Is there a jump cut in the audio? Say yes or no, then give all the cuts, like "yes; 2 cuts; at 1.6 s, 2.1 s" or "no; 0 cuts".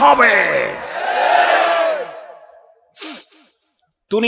no; 0 cuts